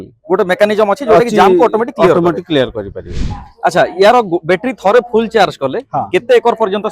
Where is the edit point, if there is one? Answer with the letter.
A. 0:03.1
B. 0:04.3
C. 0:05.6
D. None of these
A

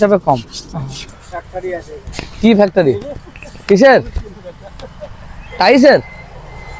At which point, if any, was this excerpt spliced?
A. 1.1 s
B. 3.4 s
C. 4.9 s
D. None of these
A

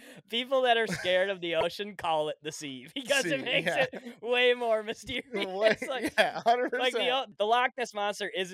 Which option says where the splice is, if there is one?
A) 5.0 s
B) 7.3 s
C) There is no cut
B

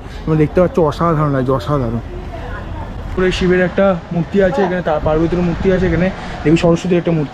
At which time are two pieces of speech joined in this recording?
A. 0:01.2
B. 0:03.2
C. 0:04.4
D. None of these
B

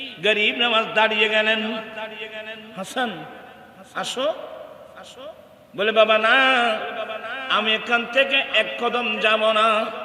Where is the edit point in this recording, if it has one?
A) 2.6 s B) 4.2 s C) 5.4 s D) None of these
A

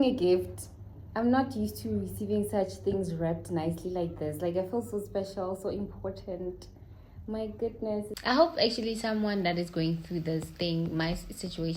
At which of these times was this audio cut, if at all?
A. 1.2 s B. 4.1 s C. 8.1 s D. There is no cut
C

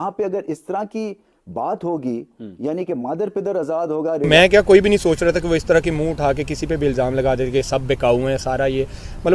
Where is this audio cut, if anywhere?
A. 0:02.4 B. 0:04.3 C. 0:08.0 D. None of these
B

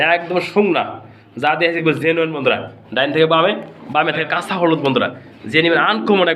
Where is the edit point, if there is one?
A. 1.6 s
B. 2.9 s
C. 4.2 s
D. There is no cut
C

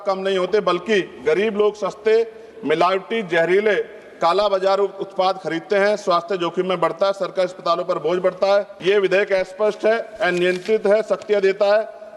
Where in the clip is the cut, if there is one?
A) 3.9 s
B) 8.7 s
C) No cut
B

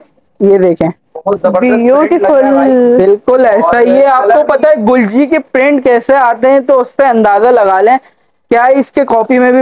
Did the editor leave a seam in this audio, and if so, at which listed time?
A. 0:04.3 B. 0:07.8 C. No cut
C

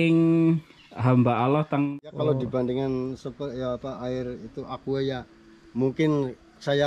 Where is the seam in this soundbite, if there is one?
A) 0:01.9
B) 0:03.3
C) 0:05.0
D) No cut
A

